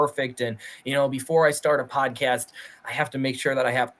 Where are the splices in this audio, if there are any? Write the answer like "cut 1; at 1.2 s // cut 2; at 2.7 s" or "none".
none

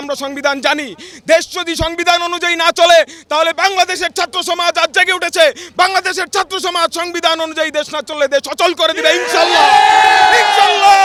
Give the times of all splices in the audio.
none

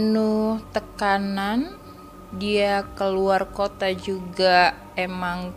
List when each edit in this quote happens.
none

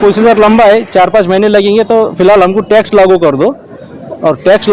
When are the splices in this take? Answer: none

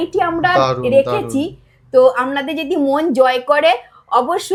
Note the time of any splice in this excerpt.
none

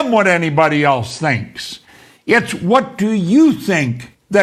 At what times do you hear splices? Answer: none

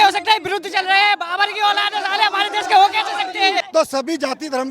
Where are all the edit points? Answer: cut 1; at 3.7 s

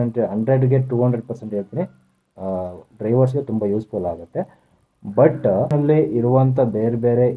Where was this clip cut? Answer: cut 1; at 5.7 s

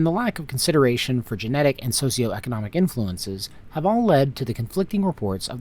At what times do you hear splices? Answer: none

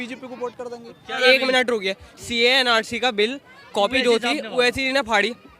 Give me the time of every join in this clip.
cut 1; at 1.2 s

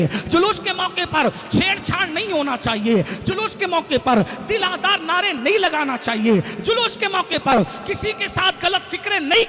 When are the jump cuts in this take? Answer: none

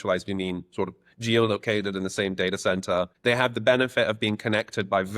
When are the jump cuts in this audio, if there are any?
cut 1; at 3.1 s

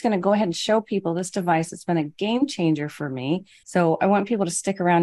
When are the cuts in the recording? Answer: cut 1; at 3.5 s

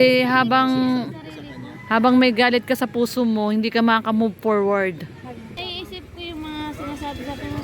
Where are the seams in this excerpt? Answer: cut 1; at 5.2 s

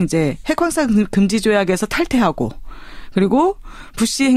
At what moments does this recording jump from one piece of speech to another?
none

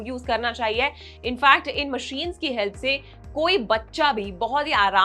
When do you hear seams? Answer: none

